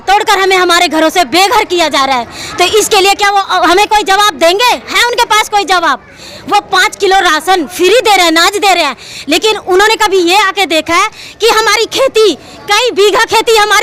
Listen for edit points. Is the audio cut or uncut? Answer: uncut